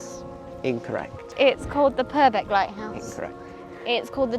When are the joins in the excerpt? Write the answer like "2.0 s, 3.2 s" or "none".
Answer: 1.2 s